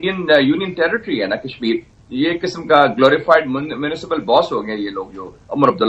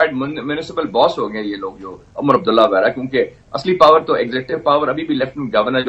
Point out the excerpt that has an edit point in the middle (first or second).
first